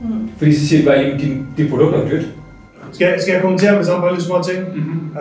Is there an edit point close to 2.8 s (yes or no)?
yes